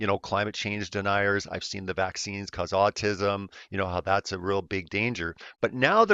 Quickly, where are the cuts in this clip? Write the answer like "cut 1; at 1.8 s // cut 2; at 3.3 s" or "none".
cut 1; at 2.2 s